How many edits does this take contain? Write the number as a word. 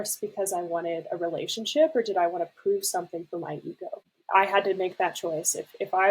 one